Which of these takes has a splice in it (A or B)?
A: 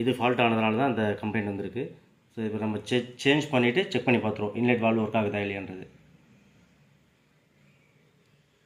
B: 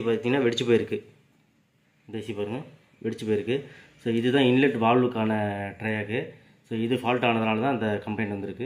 A